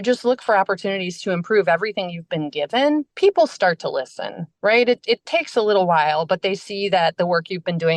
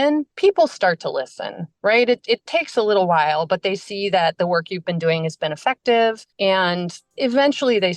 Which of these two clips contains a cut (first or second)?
second